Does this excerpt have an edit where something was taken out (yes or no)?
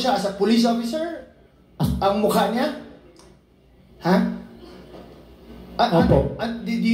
no